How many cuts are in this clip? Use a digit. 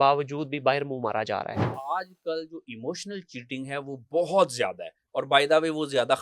1